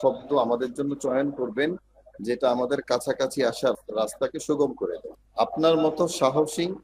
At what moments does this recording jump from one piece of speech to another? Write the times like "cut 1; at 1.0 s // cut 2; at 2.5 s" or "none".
cut 1; at 5.1 s